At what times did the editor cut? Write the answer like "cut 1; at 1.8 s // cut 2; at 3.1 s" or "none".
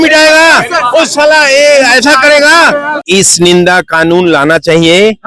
cut 1; at 2.9 s